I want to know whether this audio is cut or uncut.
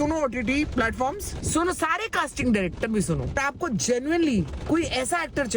cut